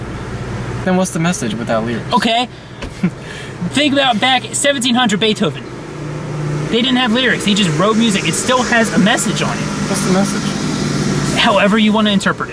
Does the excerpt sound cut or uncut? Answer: uncut